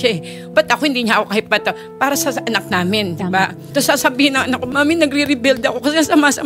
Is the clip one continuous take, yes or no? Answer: no